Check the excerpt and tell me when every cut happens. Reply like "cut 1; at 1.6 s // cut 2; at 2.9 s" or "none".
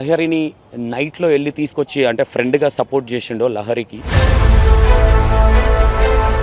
cut 1; at 4.1 s